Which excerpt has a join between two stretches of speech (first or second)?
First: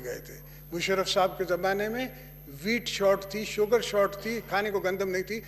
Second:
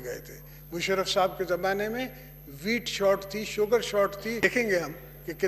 second